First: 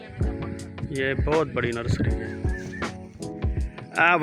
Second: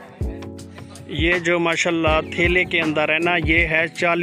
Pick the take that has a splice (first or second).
first